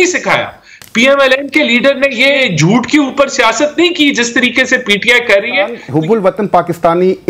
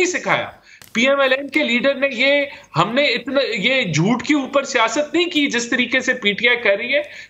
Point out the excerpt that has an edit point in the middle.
first; 2 cuts; at 2.4 s, 5.8 s

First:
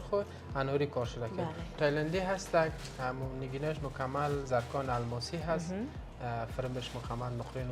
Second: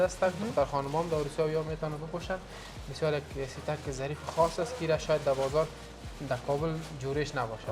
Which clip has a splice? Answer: first; 1 cut; at 1.7 s

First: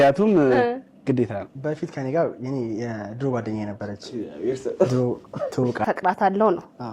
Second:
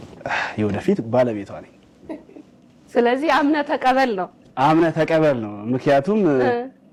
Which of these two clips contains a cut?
first; 1 cut; at 5.8 s

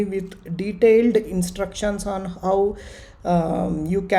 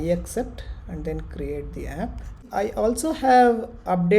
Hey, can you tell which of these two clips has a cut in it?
second; 1 cut; at 2.4 s

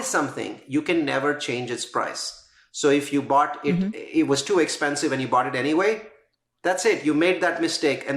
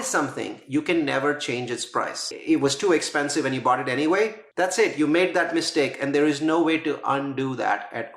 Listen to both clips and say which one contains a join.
second; 2 cuts; at 2.3 s, 4.4 s

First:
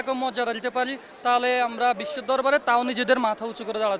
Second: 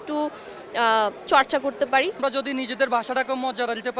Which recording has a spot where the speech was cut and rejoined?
second; 1 cut; at 2.2 s

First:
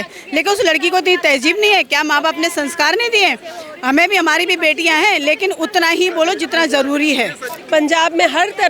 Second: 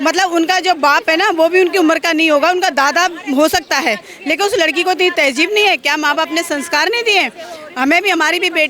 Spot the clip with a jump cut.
first; 1 cut; at 7.5 s

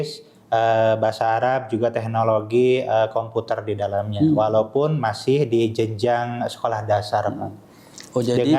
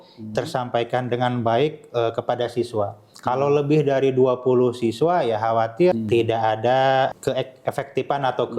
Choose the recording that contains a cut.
second; 2 cuts; at 5.9 s, 7.1 s

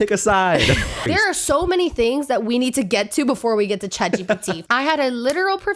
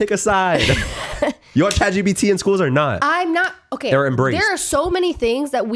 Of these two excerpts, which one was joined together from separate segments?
first; 2 cuts; at 1.1 s, 4.6 s

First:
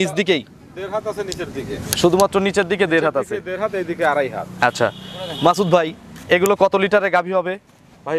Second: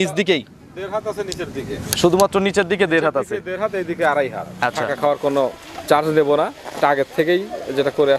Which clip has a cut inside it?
second; 1 cut; at 4.8 s

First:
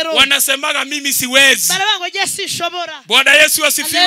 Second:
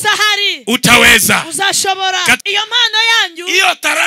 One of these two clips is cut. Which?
second; 1 cut; at 2.4 s

